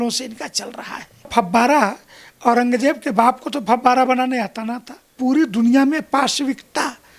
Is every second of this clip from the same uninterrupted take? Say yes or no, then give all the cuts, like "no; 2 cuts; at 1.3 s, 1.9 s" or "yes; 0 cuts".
no; 2 cuts; at 1.3 s, 5.1 s